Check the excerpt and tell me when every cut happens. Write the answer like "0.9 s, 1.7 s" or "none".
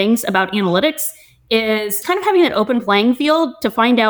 2.0 s